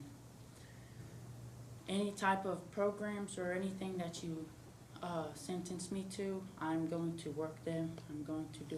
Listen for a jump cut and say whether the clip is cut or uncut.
uncut